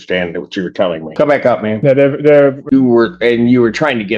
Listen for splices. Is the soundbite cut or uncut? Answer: cut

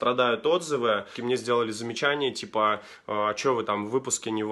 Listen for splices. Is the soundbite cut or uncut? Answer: cut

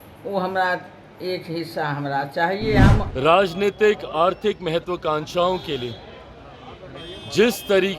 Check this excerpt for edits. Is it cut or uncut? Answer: cut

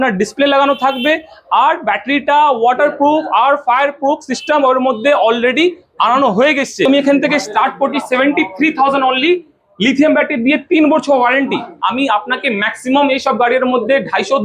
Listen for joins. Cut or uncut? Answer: cut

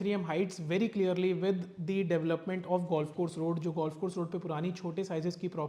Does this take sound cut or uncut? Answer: uncut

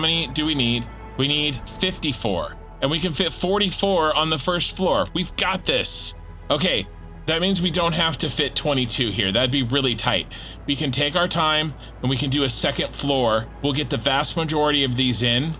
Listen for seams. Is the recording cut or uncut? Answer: cut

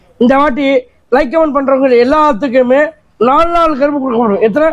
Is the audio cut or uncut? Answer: uncut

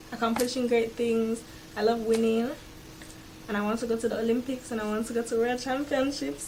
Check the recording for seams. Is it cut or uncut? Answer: uncut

